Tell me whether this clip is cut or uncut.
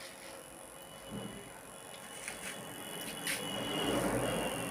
uncut